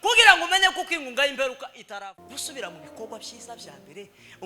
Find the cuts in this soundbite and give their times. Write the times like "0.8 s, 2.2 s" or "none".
1.8 s